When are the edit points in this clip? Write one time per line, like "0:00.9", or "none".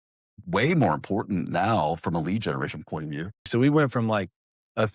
0:03.5